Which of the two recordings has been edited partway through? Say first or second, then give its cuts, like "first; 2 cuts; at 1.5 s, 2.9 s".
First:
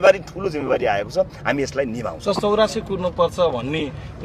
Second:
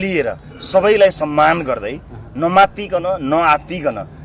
first; 1 cut; at 2.4 s